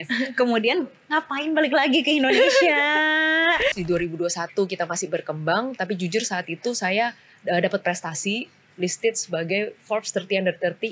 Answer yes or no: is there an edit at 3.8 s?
yes